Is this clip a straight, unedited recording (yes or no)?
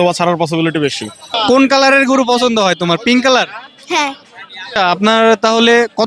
no